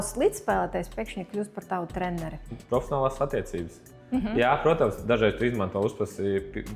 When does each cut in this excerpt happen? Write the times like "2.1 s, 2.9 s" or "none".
2.5 s